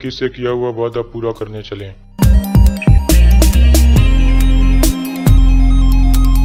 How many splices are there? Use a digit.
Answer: 0